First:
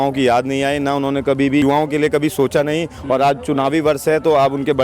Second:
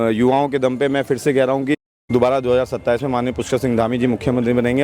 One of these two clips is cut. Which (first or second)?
first